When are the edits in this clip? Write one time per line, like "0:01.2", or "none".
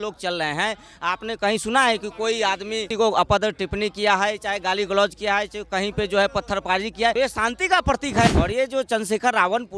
0:02.9
0:07.1
0:08.3